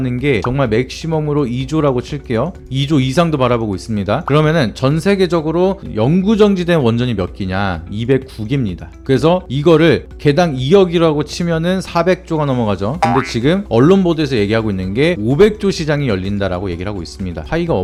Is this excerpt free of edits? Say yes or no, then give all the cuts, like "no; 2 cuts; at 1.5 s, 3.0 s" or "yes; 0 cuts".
yes; 0 cuts